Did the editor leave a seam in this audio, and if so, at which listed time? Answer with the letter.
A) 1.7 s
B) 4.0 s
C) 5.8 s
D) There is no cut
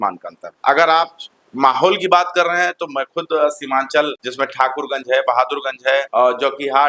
D